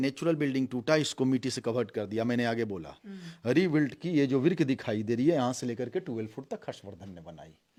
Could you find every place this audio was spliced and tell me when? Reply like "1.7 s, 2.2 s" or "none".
none